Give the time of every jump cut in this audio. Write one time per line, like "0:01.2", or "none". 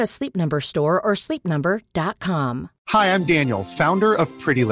0:02.7